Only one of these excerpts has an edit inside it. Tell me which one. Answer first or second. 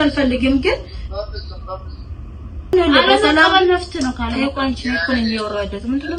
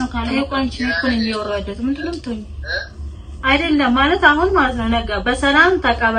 first